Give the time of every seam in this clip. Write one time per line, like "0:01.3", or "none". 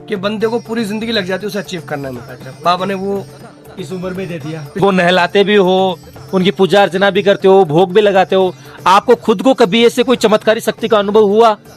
0:04.8